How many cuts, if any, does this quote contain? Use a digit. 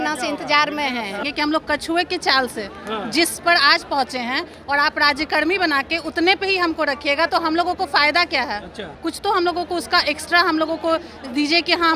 2